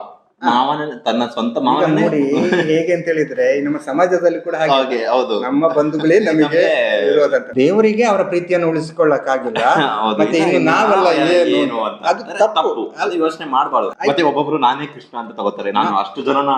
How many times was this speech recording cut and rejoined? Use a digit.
2